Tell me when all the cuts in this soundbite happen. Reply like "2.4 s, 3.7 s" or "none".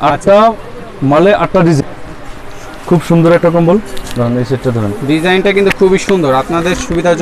1.8 s